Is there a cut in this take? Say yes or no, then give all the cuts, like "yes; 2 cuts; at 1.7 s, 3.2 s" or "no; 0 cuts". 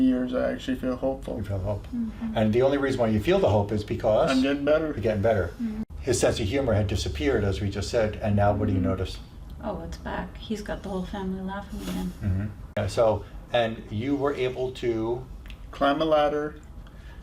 yes; 2 cuts; at 5.8 s, 12.7 s